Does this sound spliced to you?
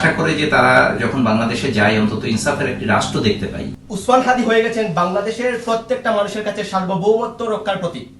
yes; 1 cut; at 3.7 s

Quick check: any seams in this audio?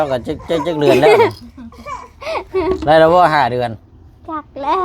no; 0 cuts

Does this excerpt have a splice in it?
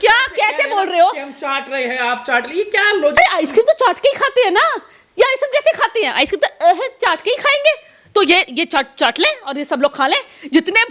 no; 0 cuts

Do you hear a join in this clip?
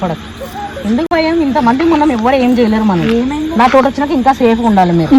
no; 0 cuts

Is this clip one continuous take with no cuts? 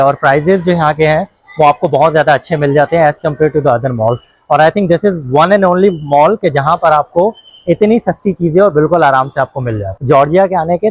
no; 1 cut; at 9.9 s

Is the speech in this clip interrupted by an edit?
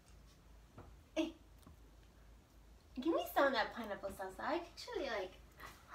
no; 0 cuts

